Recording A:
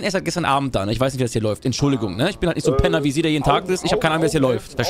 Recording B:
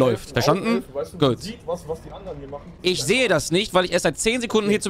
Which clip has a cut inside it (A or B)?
B